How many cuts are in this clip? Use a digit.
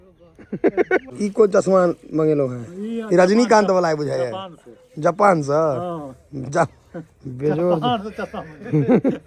1